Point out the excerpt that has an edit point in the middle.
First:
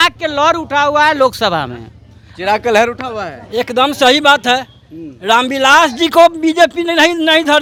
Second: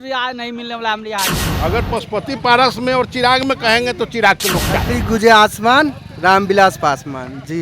second; 2 cuts; at 1.5 s, 4.9 s

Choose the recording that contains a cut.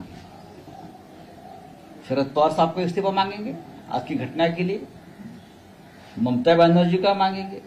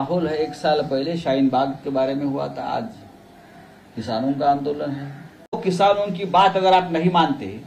second; 1 cut; at 5.6 s

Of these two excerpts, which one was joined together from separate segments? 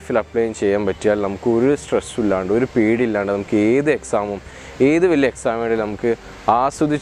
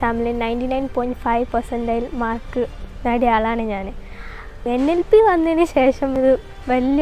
second; 1 cut; at 4.6 s

